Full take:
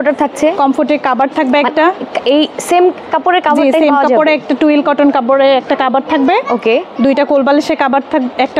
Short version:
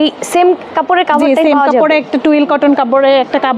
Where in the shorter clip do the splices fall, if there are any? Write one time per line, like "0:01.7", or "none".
none